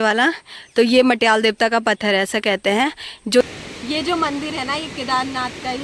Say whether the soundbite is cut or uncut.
cut